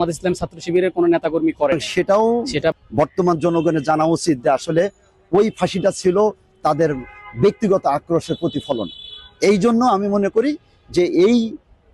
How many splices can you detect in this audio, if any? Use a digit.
1